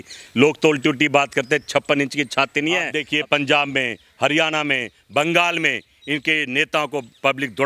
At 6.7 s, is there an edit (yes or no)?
no